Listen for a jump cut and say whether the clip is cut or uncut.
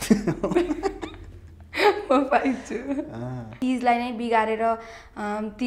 cut